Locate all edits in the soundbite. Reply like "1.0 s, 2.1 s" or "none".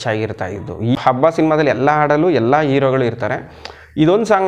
1.0 s